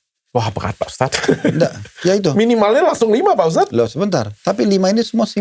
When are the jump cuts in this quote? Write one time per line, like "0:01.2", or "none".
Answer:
none